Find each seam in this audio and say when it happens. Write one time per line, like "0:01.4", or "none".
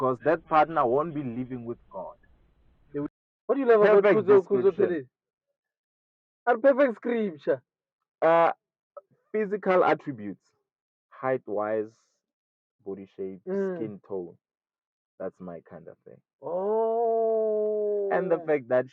0:03.1